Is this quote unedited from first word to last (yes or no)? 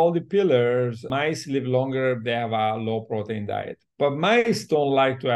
no